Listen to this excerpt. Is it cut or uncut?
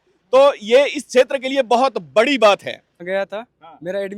cut